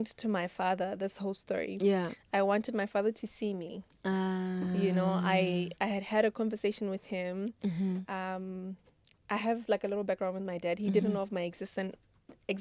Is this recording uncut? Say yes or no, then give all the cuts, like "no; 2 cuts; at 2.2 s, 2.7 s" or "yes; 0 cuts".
yes; 0 cuts